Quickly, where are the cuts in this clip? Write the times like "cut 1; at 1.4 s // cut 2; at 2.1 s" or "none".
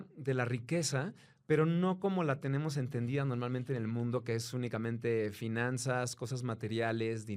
none